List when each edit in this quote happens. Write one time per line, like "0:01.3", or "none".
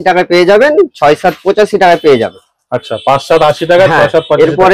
none